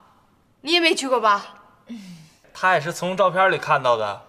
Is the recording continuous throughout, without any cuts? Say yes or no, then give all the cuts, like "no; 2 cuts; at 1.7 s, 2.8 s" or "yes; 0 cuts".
yes; 0 cuts